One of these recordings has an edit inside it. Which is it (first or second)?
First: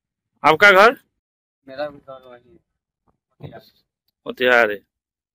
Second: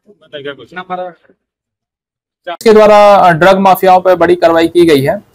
second